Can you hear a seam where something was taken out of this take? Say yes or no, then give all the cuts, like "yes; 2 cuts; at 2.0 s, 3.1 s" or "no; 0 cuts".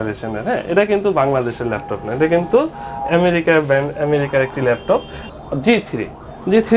yes; 1 cut; at 5.2 s